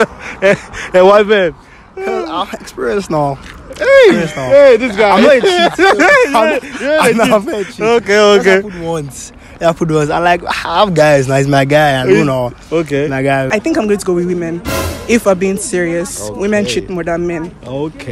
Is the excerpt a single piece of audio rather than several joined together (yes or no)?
no